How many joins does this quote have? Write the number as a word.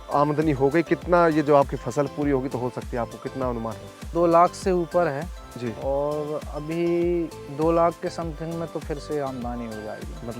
one